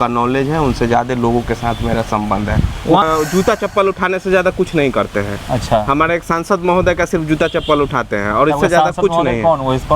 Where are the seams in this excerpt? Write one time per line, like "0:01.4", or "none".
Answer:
0:03.1